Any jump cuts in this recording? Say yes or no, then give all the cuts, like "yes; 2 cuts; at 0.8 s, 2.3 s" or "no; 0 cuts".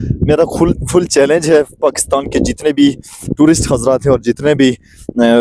no; 0 cuts